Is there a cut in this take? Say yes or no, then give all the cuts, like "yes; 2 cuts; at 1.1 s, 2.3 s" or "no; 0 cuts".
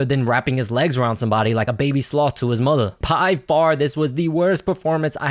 yes; 1 cut; at 3.0 s